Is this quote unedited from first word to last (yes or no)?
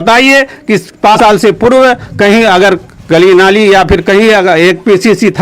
no